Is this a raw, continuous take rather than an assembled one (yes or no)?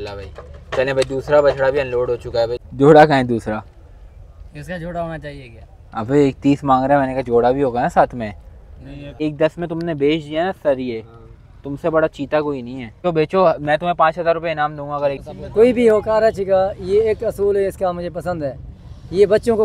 no